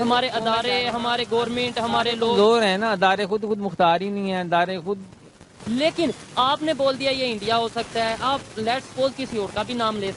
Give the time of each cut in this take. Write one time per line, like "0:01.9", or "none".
0:05.5